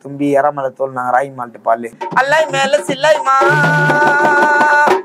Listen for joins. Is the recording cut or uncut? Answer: cut